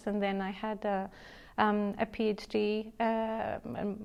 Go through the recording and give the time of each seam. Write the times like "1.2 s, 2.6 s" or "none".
none